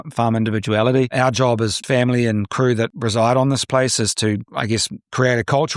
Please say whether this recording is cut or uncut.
cut